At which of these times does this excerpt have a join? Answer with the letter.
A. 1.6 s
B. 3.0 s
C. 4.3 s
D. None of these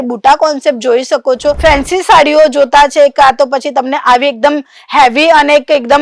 A